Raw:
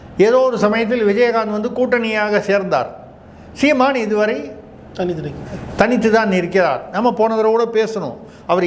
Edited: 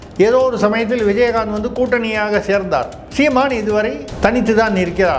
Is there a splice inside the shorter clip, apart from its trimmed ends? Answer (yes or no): yes